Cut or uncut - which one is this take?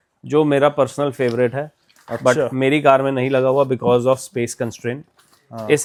uncut